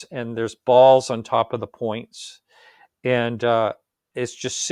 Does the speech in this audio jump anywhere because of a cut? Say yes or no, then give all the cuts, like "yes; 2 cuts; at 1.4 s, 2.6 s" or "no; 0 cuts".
no; 0 cuts